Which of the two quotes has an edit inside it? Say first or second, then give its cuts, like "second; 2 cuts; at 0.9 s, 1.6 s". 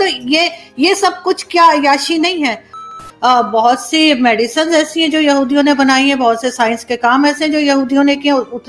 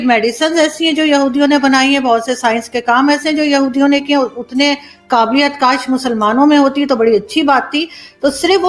first; 1 cut; at 2.9 s